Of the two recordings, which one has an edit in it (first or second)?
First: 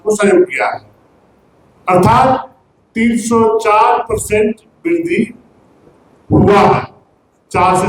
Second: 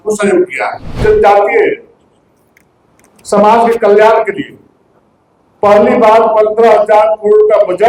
second